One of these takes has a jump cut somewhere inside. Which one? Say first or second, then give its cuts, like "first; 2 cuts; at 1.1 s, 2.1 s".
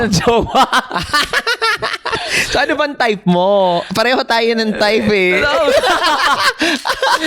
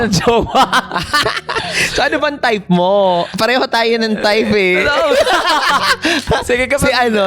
second; 2 cuts; at 1.2 s, 6.2 s